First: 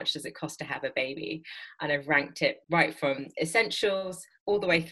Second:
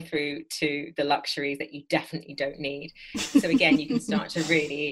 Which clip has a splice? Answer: first; 1 cut; at 2.6 s

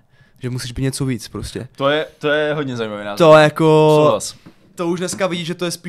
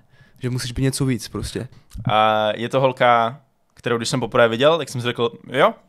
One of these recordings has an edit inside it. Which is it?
second; 1 cut; at 1.6 s

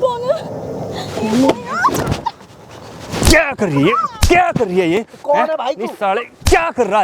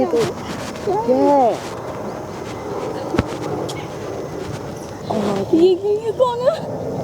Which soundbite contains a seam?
second; 1 cut; at 5.0 s

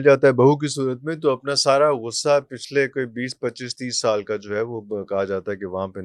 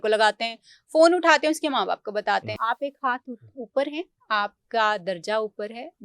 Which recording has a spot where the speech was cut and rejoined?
second; 1 cut; at 2.5 s

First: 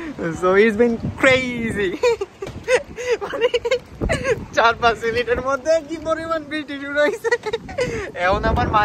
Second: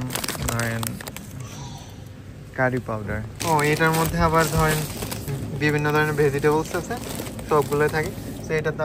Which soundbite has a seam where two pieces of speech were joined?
second; 1 cut; at 3.4 s

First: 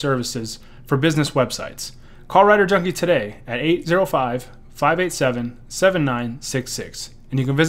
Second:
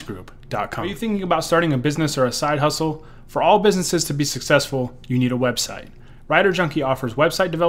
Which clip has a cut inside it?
second; 1 cut; at 0.9 s

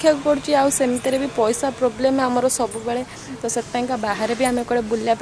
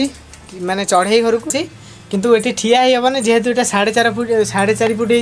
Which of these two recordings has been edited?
second; 1 cut; at 1.6 s

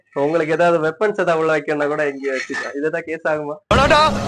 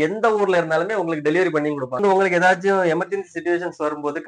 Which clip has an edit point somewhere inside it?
second; 1 cut; at 2.0 s

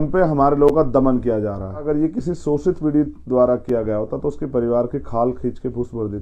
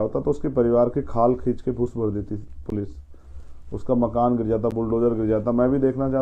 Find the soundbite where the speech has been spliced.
first; 1 cut; at 1.8 s

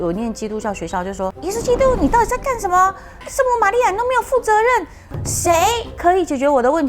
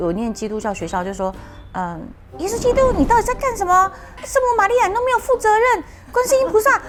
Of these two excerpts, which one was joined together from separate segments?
first; 2 cuts; at 1.4 s, 5.1 s

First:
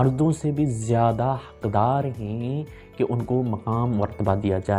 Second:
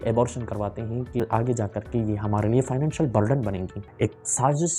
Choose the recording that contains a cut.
second; 2 cuts; at 1.2 s, 3.8 s

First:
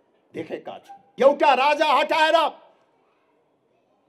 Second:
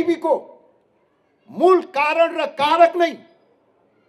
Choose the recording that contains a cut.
first; 1 cut; at 1.0 s

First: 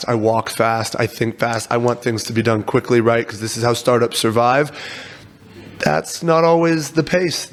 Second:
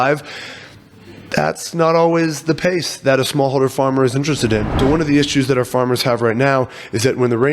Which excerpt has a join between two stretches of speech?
second; 1 cut; at 4.7 s

